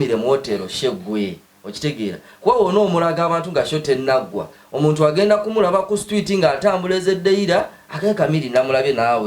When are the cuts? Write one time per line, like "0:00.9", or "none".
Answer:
none